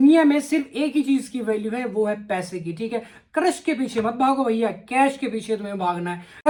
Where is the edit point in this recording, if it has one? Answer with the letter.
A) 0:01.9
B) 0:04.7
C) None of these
C